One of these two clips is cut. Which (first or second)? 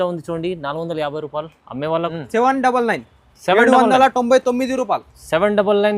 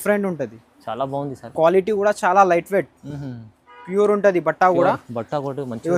first